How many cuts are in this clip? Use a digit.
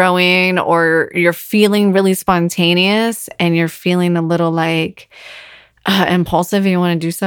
0